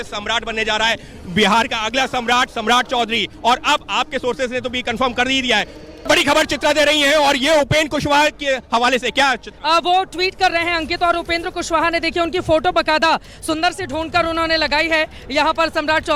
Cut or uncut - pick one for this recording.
cut